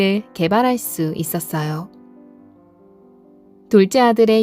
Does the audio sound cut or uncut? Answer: cut